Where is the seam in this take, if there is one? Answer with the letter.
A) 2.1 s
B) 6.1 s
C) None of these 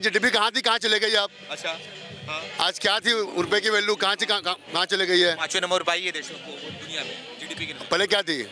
C